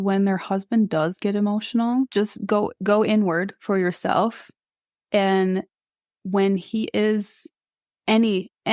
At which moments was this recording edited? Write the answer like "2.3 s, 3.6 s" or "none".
2.1 s